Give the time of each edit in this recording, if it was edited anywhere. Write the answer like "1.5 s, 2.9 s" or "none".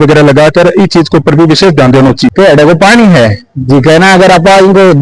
2.3 s